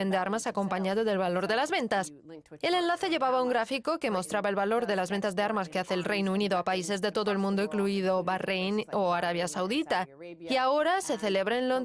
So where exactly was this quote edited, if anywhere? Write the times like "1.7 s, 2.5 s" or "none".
5.7 s